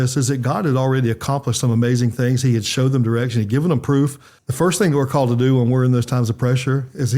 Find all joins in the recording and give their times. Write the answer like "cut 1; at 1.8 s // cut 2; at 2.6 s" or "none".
cut 1; at 4.3 s